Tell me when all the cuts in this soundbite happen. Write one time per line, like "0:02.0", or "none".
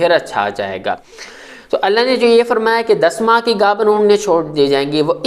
0:01.0